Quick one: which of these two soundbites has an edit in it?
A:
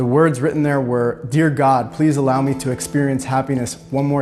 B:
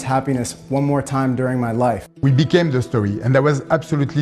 B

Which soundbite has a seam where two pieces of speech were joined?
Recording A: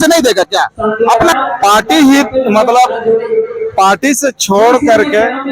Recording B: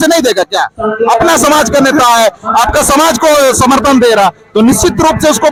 A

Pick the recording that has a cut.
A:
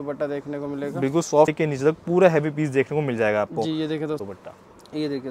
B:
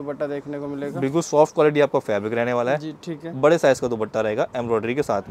A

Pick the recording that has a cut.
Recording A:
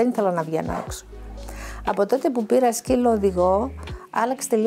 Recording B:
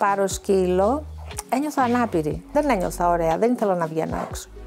B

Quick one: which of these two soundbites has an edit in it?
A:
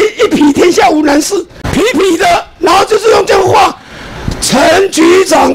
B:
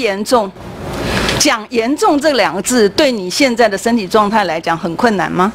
A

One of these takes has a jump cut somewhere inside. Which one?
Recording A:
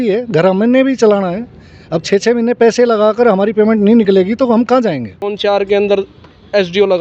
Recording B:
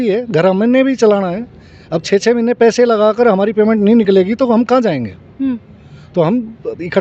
A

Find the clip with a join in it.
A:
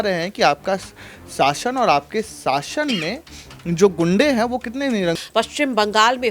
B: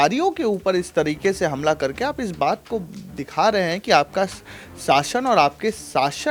A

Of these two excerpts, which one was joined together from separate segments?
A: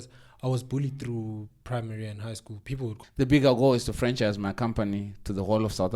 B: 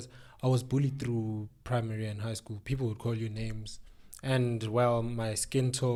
A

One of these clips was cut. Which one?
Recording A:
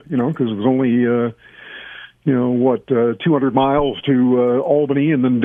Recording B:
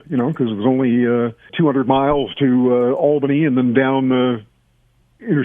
B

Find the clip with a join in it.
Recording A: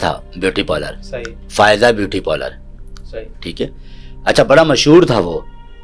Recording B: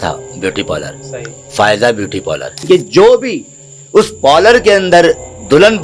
B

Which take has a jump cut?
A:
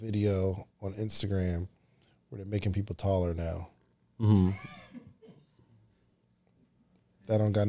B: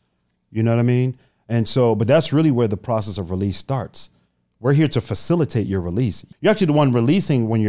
B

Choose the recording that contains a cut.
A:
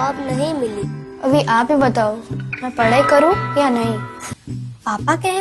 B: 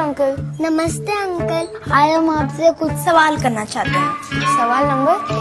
A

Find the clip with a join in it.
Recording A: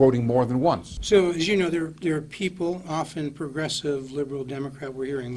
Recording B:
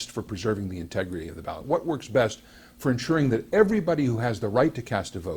A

